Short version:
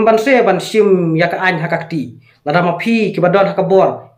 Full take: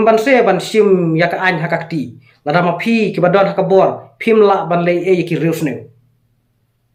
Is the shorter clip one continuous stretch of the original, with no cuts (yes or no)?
yes